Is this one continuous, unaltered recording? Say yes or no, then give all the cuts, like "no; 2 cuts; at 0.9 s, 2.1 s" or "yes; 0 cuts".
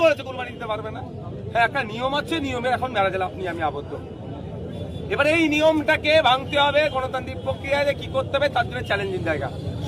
yes; 0 cuts